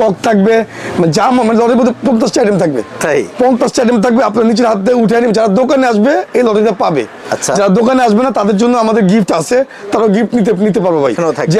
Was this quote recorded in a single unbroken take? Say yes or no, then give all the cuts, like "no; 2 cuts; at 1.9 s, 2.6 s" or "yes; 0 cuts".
yes; 0 cuts